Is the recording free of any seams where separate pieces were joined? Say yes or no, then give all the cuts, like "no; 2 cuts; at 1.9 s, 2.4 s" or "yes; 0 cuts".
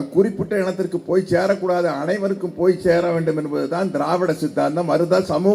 yes; 0 cuts